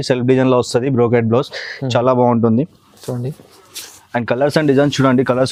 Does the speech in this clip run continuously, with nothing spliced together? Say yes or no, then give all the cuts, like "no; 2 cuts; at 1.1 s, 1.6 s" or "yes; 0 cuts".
yes; 0 cuts